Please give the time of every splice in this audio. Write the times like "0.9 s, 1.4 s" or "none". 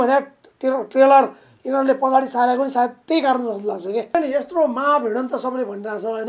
4.1 s